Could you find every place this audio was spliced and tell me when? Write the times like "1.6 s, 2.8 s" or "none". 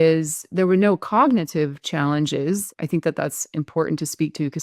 2.7 s